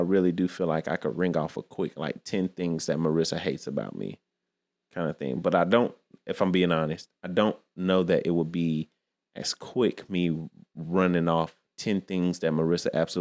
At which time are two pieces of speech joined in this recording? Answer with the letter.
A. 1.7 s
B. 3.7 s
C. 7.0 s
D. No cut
D